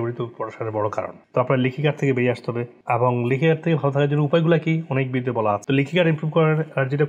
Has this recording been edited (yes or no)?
yes